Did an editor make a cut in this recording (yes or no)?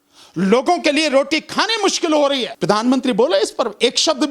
yes